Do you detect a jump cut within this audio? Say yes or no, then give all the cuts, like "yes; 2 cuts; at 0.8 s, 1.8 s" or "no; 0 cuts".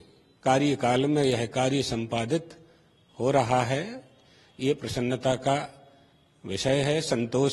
no; 0 cuts